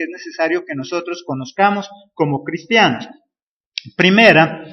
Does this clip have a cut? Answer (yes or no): yes